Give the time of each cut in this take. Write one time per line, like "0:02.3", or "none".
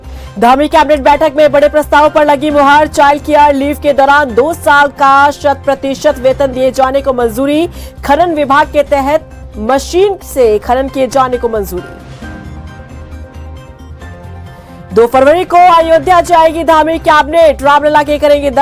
none